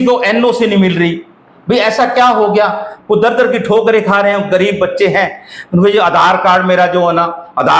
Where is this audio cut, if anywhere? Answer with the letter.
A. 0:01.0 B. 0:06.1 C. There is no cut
C